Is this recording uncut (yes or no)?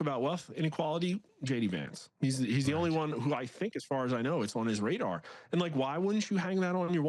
yes